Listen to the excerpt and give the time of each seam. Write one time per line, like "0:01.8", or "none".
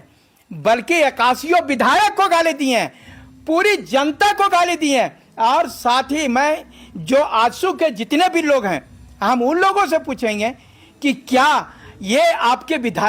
none